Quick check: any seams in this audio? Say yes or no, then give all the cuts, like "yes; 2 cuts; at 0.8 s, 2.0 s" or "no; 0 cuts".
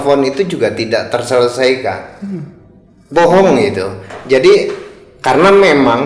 yes; 1 cut; at 4.1 s